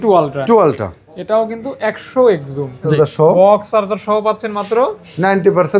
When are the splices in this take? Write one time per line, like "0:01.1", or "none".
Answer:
0:02.9